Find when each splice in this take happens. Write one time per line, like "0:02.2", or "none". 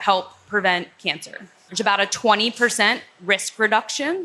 0:01.7